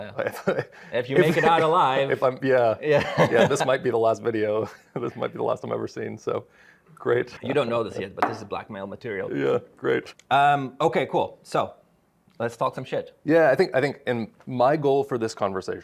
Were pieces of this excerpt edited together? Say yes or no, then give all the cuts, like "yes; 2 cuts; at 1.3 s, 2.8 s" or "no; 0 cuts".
no; 0 cuts